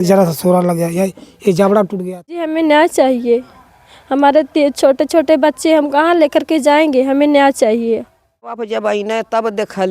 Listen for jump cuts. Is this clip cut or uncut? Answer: cut